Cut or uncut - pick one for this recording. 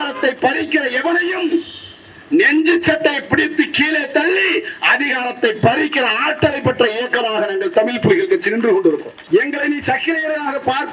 cut